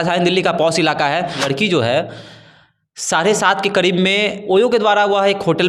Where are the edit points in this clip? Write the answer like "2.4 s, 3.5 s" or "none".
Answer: 1.4 s, 4.4 s

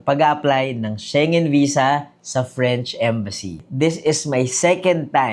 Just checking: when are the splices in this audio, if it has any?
3.6 s

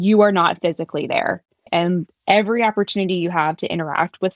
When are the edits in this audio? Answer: 1.5 s

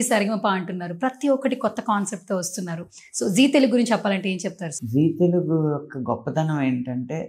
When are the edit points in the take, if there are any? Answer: none

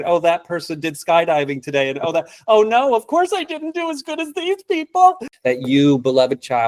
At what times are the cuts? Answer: 5.3 s

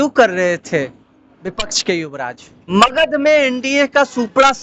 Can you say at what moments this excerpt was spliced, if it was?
2.5 s

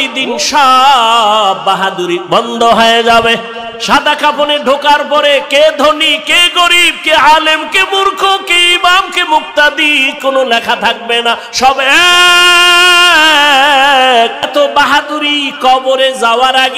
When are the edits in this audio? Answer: 4.0 s, 14.5 s

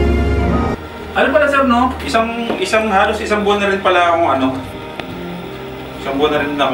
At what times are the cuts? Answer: 0.8 s, 2.0 s

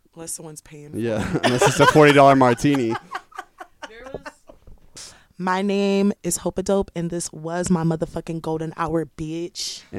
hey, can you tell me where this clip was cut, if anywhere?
4.9 s

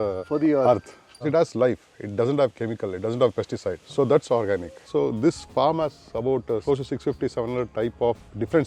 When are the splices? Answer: 1.3 s, 3.8 s, 4.9 s

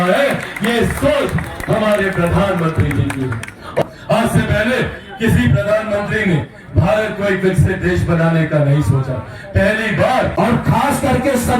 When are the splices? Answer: 3.8 s, 10.3 s

